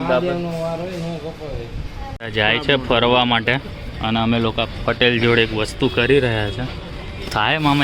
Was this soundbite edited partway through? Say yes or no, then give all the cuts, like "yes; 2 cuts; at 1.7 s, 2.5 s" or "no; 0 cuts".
yes; 1 cut; at 2.1 s